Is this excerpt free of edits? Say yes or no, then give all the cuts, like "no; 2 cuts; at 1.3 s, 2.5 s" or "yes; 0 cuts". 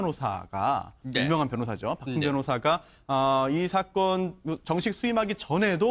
no; 1 cut; at 4.3 s